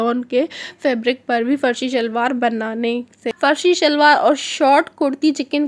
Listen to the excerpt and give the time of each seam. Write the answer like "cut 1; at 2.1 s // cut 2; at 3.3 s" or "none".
cut 1; at 3.2 s